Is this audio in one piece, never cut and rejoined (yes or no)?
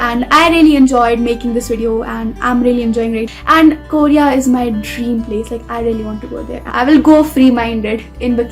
no